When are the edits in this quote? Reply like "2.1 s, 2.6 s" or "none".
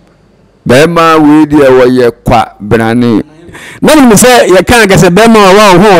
3.7 s